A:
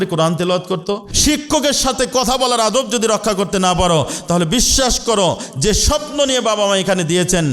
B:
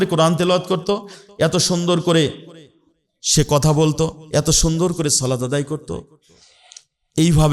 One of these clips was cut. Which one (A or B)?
A